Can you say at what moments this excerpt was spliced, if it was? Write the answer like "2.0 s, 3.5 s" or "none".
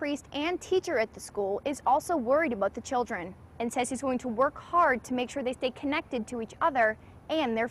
none